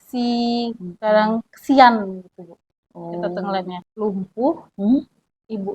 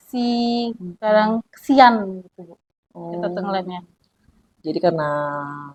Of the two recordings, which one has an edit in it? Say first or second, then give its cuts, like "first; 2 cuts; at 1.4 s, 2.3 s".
first; 1 cut; at 3.8 s